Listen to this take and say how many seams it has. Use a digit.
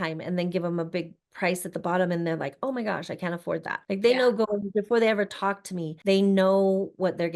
2